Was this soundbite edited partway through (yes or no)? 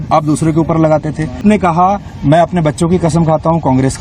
yes